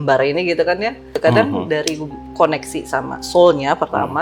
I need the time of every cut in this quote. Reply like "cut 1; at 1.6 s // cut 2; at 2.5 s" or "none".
cut 1; at 1.2 s